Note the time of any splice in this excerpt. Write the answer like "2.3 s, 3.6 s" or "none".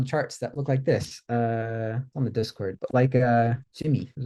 none